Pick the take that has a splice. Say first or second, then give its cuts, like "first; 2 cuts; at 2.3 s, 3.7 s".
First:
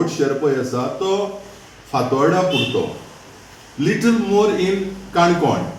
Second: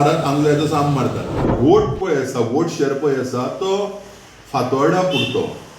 second; 1 cut; at 1.5 s